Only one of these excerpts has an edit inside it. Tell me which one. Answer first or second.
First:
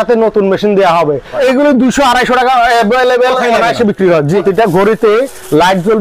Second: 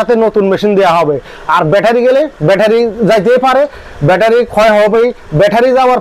first